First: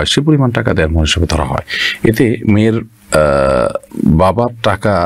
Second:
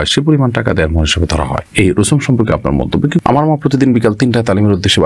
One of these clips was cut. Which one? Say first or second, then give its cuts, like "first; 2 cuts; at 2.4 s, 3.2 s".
second; 2 cuts; at 1.6 s, 3.2 s